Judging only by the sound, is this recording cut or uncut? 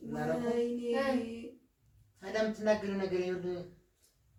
uncut